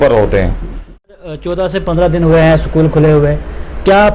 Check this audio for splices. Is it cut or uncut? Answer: cut